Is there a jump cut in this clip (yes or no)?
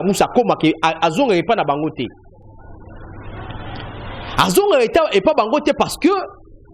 no